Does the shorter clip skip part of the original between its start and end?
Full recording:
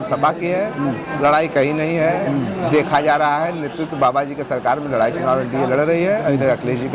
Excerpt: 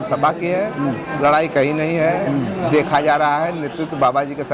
no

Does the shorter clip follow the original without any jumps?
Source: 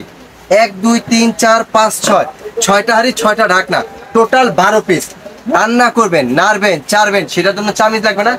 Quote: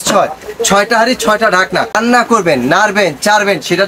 no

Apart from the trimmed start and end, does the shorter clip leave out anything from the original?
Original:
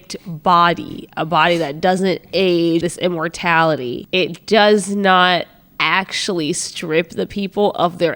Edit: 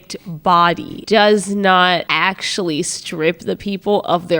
yes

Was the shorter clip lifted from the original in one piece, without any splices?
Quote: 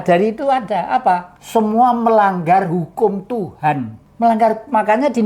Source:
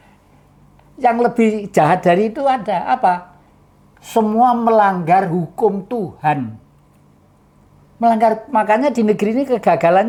no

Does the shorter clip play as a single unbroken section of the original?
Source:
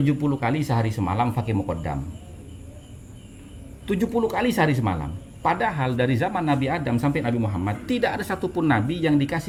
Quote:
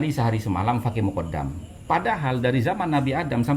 no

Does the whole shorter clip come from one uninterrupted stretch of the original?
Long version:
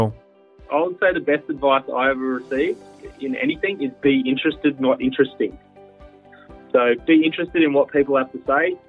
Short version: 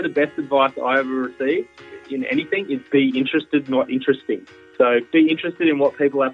no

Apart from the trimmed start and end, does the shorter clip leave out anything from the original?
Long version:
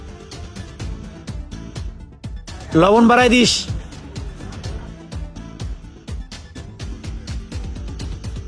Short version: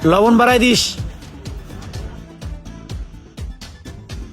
no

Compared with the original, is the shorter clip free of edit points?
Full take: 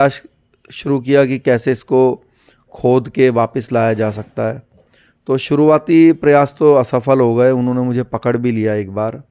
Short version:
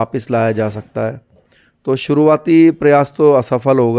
yes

